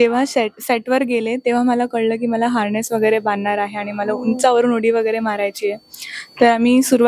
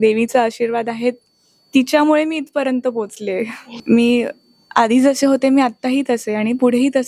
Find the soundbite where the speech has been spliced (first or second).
second